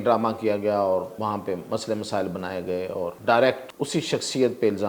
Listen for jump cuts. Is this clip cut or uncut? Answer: cut